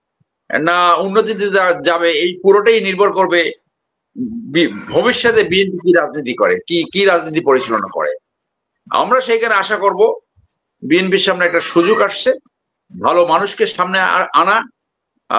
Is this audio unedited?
yes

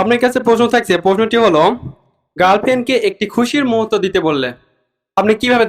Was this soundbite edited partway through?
no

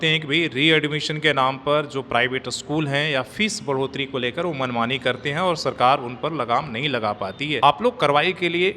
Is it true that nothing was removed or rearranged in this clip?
no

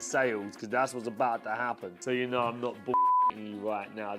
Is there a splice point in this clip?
yes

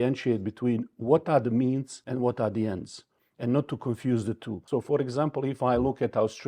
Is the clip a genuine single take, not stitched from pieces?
no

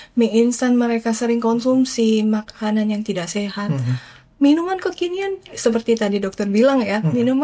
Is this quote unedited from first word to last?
yes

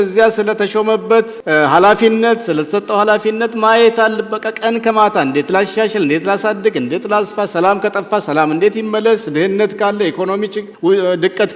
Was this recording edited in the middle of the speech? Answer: yes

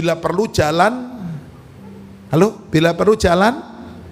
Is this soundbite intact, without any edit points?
yes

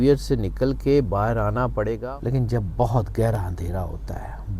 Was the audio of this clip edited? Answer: yes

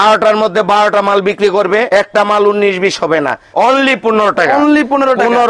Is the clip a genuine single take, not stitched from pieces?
no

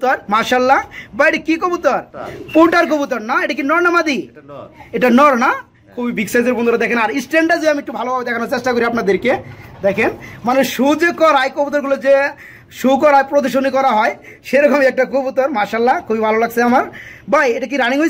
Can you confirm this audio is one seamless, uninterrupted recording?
yes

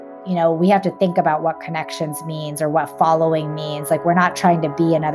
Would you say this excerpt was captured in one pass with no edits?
yes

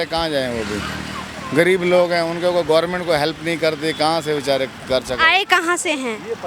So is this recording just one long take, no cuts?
yes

